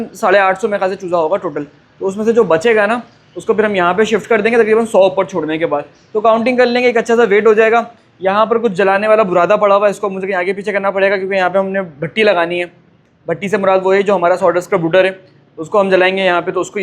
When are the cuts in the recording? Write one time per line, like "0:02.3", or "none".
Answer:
none